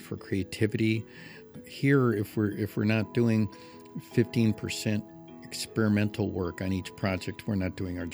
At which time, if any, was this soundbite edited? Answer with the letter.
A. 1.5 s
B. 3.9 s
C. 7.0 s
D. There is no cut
A